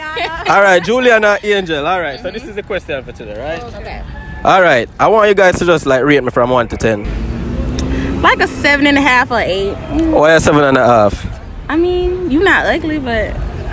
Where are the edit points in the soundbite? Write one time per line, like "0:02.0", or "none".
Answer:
0:07.0